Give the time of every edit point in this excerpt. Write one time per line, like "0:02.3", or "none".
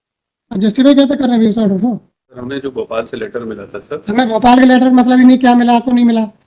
0:02.4